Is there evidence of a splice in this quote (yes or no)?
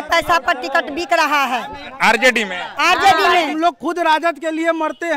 yes